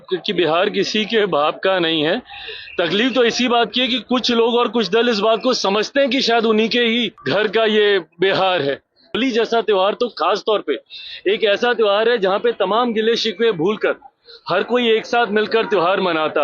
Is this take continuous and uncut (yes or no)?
no